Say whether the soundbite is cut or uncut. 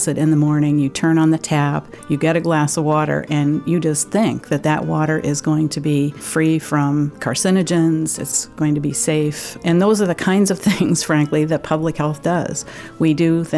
cut